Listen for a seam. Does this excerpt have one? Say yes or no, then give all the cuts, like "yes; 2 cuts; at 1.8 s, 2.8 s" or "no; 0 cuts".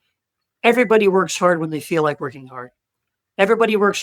no; 0 cuts